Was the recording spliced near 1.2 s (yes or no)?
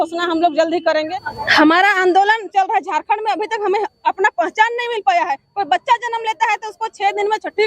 yes